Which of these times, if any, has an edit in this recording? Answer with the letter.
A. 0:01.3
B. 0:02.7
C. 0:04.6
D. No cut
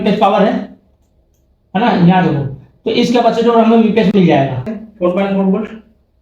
C